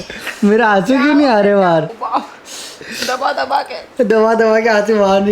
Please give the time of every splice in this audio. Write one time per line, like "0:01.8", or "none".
0:01.9

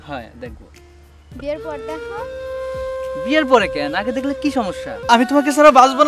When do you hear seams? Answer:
0:04.9

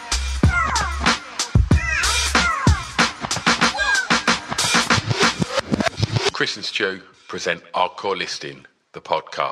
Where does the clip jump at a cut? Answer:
none

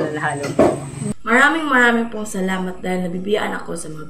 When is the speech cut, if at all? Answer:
0:01.0

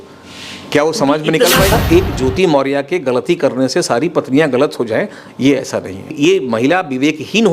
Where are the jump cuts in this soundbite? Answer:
0:01.7
0:06.1

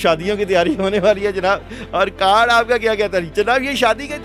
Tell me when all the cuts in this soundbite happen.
none

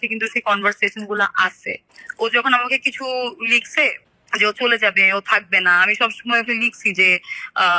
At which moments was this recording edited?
none

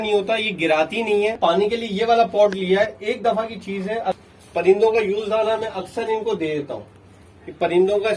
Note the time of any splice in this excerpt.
0:01.4
0:04.2

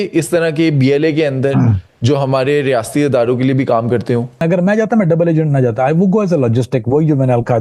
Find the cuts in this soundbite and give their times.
0:04.4

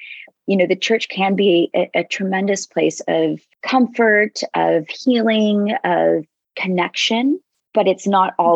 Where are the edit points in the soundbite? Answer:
0:03.5
0:07.6

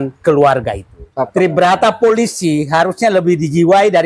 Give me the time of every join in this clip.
0:01.2

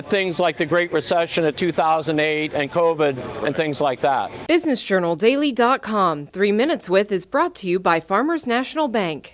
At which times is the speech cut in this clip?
0:04.3

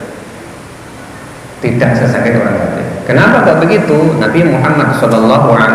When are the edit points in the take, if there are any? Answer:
none

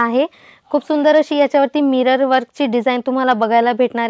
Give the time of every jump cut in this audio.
none

